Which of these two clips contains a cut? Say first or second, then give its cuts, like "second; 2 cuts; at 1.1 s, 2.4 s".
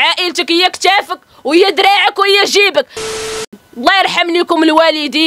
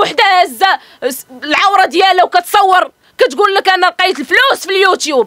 first; 1 cut; at 3.4 s